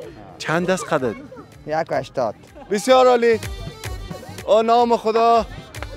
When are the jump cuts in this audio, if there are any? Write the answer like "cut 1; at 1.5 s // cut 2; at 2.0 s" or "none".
cut 1; at 2.5 s